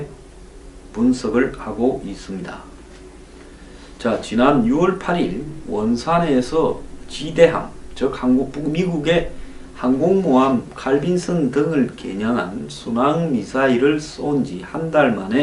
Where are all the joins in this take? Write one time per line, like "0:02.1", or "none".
0:10.0